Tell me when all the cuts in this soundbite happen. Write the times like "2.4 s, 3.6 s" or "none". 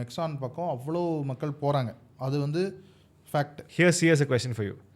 3.6 s